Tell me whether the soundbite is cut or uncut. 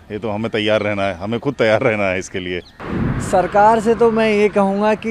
cut